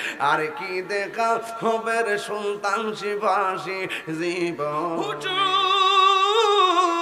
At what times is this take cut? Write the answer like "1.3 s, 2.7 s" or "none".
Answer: 5.2 s